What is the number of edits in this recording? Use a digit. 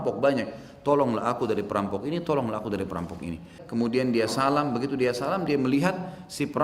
1